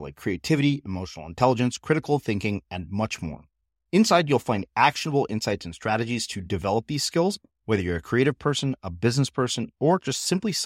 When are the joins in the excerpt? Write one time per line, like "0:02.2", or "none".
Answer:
none